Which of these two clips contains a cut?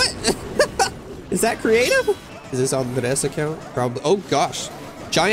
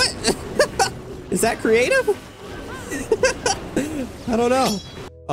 first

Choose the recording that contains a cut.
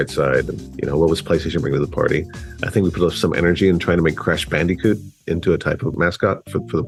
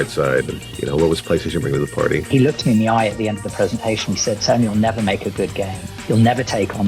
second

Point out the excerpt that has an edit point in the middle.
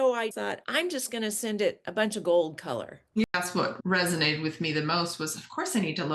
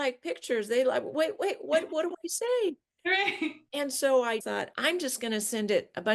first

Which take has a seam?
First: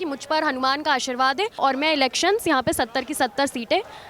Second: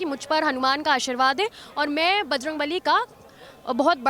first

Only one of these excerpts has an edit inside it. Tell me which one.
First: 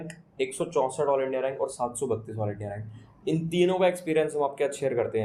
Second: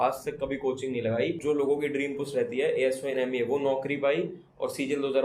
second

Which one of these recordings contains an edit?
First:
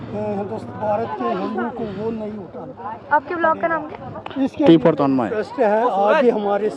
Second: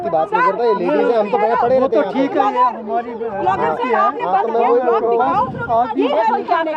first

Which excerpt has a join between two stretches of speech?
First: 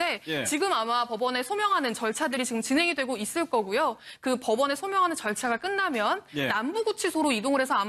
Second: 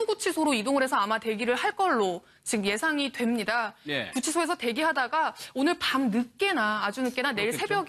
first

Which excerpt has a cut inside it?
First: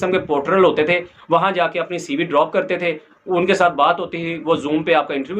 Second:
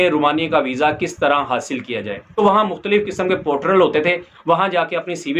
second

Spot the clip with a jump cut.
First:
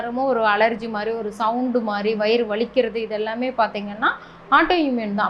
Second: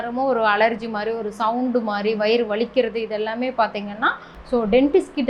second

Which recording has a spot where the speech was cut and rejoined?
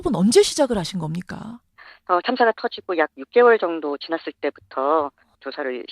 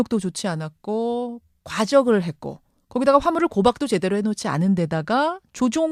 first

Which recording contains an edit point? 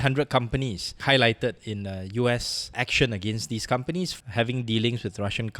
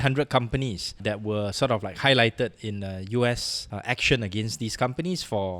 first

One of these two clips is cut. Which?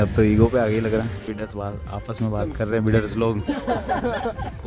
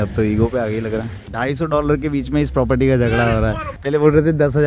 second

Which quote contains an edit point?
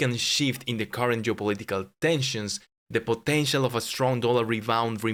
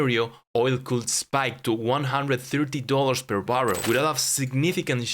second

